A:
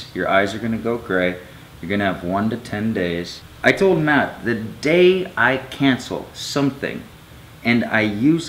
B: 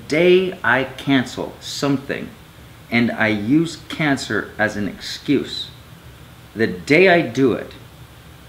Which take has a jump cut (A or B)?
A